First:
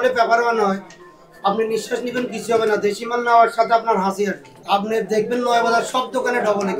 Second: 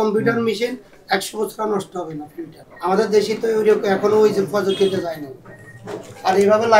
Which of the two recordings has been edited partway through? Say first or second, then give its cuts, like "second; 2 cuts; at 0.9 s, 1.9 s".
first; 1 cut; at 4.5 s